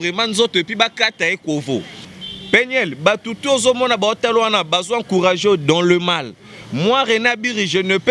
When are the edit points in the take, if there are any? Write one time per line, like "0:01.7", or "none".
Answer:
0:02.0